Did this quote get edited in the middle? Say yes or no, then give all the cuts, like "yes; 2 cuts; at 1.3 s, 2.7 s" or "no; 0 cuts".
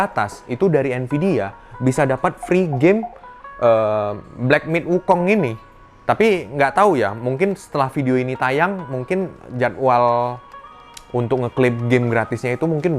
no; 0 cuts